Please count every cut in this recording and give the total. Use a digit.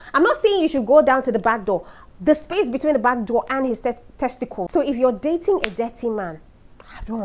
1